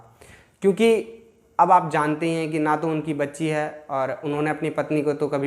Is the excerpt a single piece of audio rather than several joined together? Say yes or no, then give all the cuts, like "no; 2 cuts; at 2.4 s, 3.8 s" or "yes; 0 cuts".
yes; 0 cuts